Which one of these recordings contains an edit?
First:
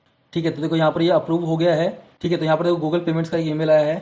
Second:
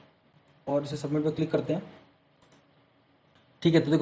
first; 1 cut; at 2.1 s

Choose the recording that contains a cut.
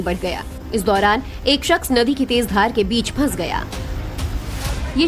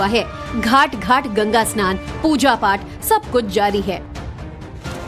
first; 1 cut; at 2.5 s

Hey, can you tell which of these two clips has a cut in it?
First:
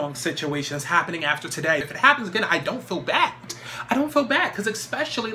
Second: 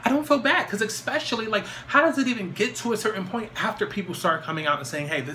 first; 1 cut; at 1.8 s

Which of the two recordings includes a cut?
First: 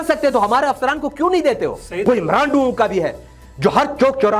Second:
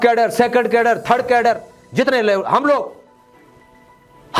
first; 1 cut; at 1.9 s

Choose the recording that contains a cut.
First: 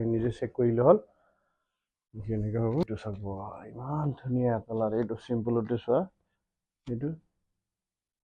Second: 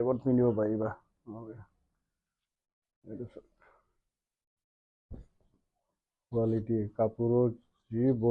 first; 1 cut; at 2.8 s

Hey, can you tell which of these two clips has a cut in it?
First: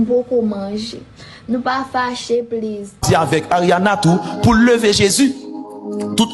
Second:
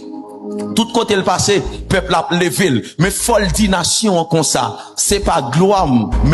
first; 1 cut; at 3.0 s

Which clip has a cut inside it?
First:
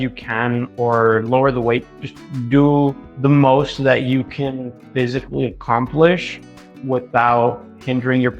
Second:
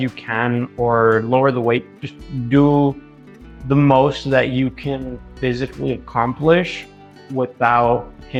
first; 1 cut; at 3.1 s

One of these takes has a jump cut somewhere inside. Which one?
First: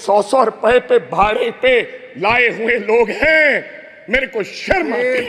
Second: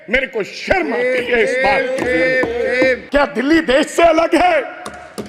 second; 1 cut; at 3.0 s

